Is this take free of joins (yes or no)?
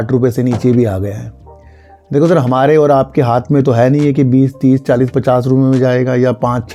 yes